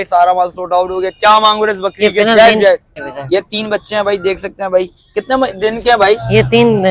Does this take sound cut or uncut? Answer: cut